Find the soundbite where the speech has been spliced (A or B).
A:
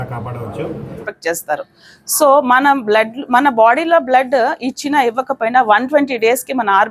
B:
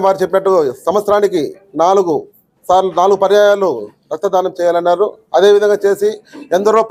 A